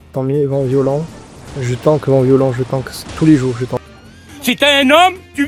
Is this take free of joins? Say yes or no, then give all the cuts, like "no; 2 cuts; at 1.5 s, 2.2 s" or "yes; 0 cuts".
yes; 0 cuts